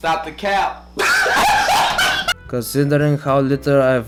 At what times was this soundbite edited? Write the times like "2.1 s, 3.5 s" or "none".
none